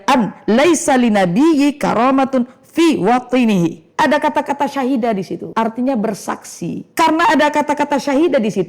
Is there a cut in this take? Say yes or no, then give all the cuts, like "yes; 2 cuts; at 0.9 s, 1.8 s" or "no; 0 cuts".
yes; 3 cuts; at 3.8 s, 5.4 s, 6.8 s